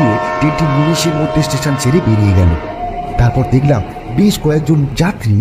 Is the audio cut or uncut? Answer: cut